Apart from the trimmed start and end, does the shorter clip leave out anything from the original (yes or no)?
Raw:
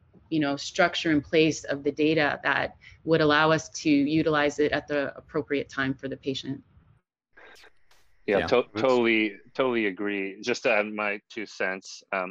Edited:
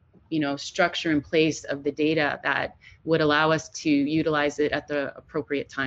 no